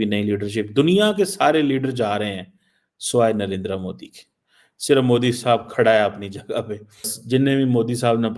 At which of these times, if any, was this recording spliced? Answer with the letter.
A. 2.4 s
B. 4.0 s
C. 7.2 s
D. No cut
C